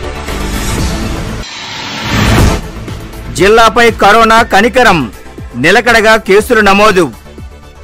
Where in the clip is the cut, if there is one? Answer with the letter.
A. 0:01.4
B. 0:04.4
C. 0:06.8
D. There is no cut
A